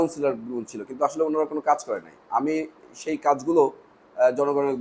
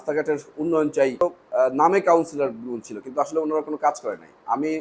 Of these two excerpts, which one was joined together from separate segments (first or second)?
second